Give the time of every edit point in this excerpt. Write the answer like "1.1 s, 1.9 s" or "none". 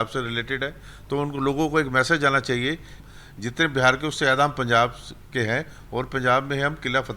3.0 s